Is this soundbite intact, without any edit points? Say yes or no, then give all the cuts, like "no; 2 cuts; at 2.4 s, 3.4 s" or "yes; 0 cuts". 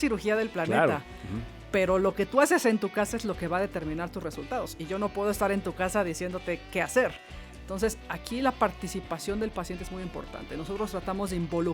yes; 0 cuts